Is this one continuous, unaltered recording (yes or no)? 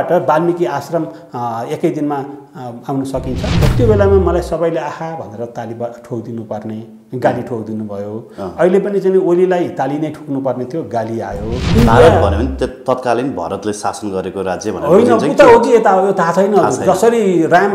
no